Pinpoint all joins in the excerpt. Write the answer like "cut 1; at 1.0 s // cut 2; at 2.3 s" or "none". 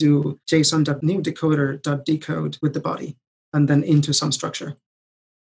cut 1; at 0.8 s // cut 2; at 2.5 s